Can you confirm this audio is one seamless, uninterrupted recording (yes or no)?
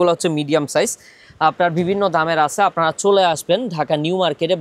yes